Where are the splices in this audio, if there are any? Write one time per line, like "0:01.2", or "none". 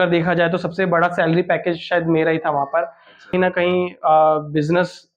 0:03.3